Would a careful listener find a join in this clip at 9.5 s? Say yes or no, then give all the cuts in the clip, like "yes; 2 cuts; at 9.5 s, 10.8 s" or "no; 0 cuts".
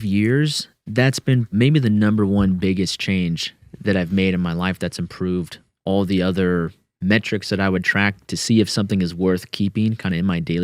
no; 2 cuts; at 1.5 s, 8.3 s